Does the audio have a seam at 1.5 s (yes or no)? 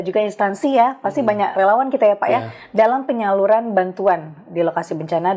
yes